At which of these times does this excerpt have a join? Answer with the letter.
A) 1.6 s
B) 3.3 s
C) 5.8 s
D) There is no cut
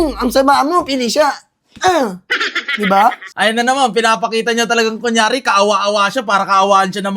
B